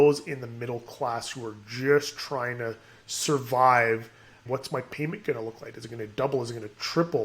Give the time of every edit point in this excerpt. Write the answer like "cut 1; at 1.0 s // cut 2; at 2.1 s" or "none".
cut 1; at 4.5 s